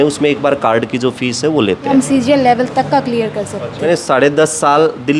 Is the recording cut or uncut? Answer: cut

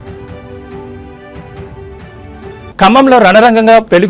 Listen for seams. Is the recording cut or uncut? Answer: cut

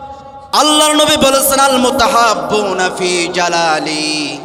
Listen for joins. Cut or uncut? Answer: uncut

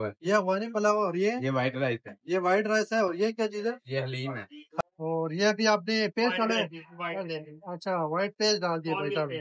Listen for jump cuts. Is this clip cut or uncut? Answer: cut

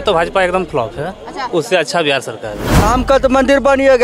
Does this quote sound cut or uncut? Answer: cut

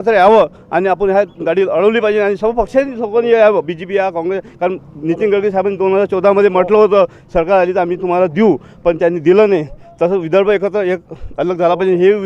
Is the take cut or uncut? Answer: uncut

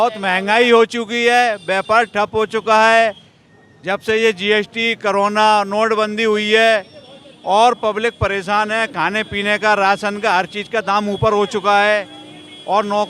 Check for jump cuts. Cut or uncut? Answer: uncut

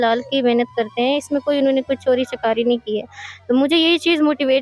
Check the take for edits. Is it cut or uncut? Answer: uncut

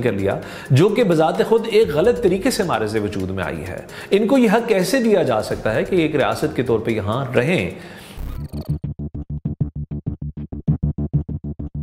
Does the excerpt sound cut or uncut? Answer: cut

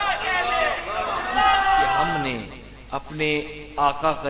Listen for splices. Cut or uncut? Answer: cut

